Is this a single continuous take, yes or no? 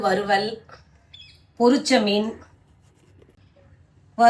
no